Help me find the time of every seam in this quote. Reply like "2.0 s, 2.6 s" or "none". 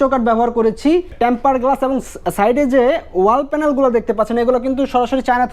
1.1 s